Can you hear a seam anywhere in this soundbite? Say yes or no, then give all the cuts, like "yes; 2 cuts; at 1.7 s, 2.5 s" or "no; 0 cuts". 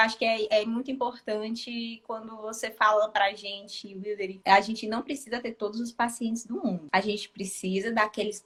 no; 0 cuts